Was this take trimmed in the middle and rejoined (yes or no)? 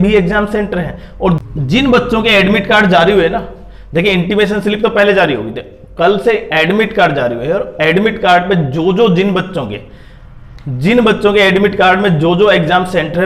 yes